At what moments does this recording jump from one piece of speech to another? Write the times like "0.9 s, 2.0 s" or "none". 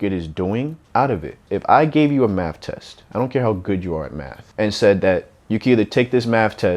0.8 s, 1.4 s